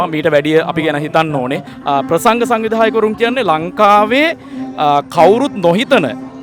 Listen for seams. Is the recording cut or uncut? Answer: cut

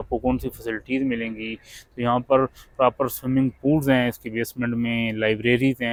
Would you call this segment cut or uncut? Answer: uncut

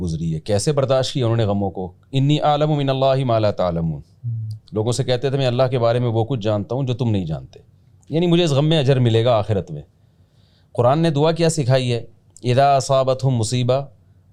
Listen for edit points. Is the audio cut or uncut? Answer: uncut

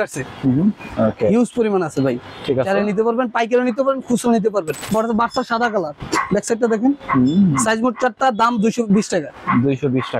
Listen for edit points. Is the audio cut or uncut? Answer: cut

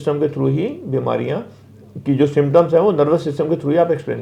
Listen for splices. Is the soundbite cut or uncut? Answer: uncut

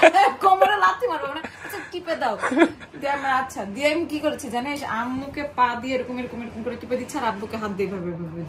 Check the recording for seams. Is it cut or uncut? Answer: uncut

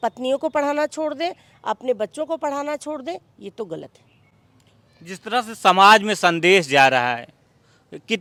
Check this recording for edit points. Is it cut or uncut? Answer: uncut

